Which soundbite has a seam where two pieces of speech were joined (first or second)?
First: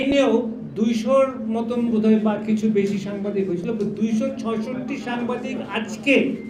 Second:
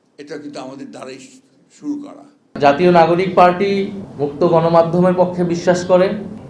second